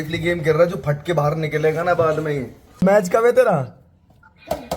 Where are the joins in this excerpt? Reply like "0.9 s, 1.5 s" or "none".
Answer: 2.8 s